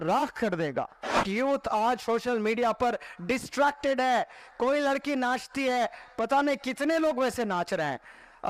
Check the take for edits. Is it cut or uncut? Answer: cut